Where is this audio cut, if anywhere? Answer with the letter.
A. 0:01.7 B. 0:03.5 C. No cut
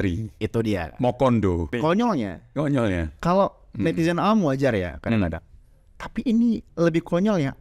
A